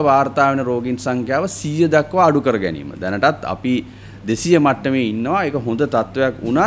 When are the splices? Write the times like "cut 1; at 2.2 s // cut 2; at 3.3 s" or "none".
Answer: none